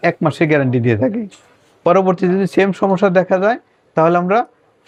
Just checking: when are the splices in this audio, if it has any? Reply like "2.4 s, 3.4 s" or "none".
none